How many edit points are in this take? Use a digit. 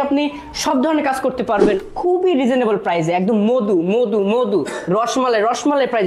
1